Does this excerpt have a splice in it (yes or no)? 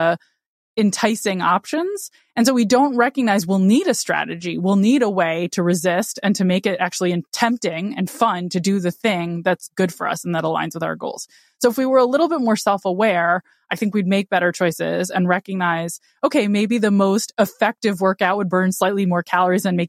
no